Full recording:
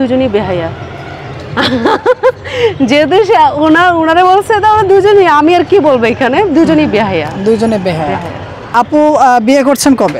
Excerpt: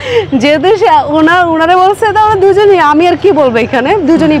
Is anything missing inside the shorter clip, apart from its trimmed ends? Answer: no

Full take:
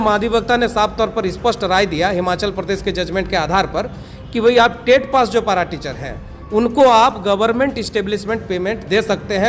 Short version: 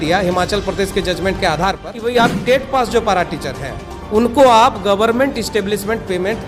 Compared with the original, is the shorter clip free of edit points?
no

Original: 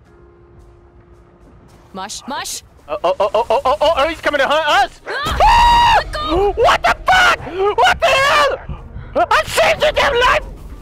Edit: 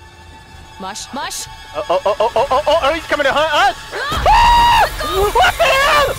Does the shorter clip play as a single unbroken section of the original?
no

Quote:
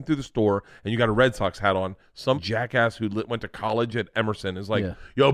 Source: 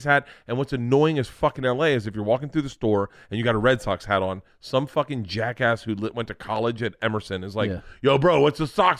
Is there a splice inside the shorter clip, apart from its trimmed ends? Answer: yes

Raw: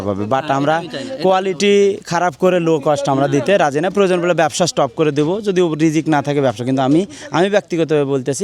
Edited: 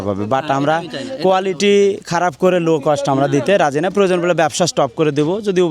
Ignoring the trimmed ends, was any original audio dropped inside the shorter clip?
no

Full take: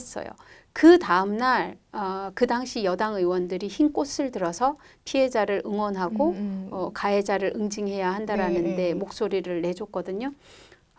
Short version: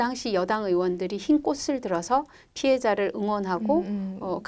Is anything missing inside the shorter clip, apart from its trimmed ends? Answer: no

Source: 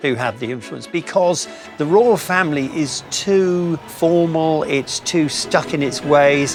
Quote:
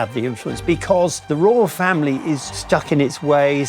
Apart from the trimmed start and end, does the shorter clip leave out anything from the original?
yes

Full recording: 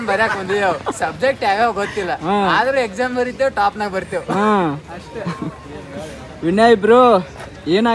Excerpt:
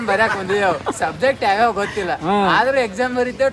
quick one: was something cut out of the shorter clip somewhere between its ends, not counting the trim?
no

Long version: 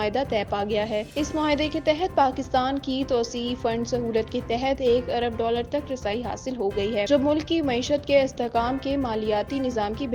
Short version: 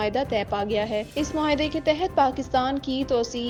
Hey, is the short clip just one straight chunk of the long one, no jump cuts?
yes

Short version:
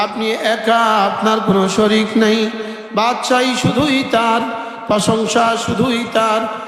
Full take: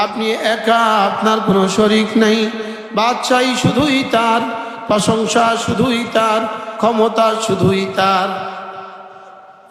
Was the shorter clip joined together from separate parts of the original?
no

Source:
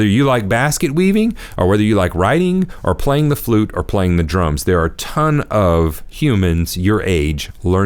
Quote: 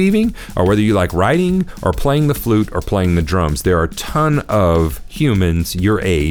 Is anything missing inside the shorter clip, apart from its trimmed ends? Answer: no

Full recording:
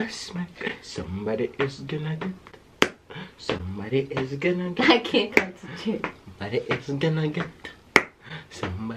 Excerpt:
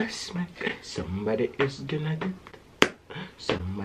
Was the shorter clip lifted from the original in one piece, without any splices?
yes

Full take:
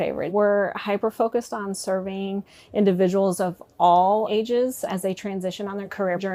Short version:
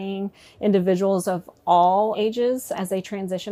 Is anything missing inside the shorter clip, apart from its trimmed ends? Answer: no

